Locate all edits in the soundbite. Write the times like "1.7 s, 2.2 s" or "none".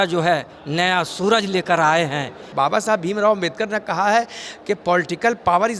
2.5 s